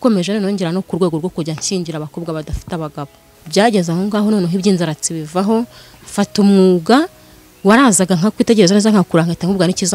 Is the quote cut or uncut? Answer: cut